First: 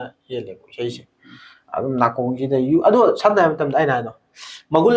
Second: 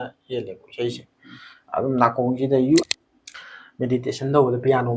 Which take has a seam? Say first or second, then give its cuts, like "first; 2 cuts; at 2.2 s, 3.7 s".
second; 1 cut; at 2.8 s